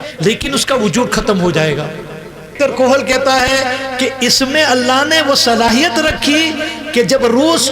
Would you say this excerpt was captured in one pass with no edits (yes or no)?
no